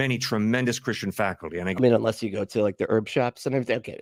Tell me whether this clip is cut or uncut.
uncut